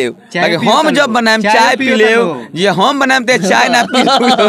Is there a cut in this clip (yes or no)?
no